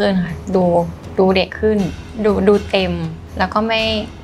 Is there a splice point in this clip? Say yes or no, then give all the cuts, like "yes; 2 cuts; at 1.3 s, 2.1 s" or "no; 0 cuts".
yes; 2 cuts; at 2.0 s, 3.2 s